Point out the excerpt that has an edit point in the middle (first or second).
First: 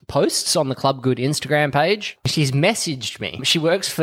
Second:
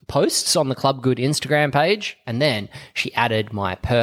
first